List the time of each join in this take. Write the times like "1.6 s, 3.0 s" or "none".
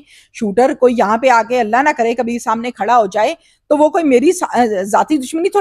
none